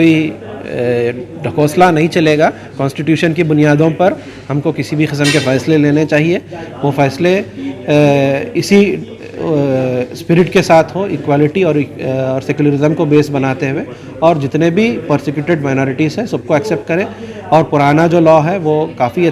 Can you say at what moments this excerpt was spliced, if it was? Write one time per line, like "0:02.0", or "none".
none